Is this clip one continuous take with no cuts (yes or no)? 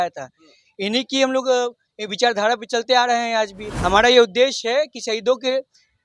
no